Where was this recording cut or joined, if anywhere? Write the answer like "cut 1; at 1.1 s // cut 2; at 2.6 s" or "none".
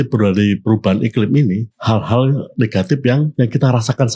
cut 1; at 1.7 s // cut 2; at 3.3 s

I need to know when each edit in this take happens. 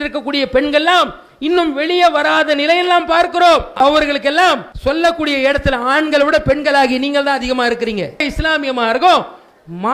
cut 1; at 3.8 s // cut 2; at 4.7 s // cut 3; at 8.2 s

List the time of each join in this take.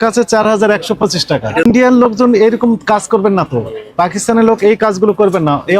cut 1; at 1.6 s

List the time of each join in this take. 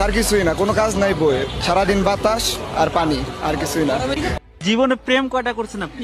cut 1; at 4.3 s

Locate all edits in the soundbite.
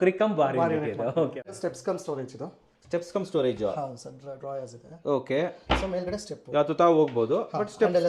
cut 1; at 1.4 s

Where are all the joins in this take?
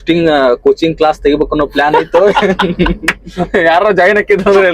none

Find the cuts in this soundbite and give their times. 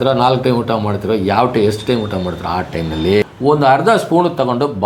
cut 1; at 3.3 s

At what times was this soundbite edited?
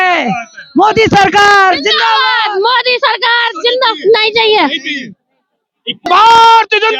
none

